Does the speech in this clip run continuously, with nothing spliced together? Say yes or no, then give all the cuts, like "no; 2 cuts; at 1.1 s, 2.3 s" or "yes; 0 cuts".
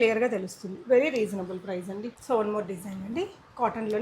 no; 1 cut; at 2.1 s